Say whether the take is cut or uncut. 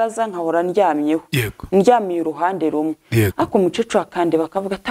uncut